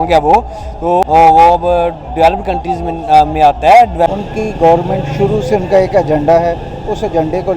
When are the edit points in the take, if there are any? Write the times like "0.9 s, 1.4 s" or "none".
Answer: 1.0 s, 4.1 s